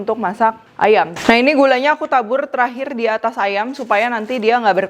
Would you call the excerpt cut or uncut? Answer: cut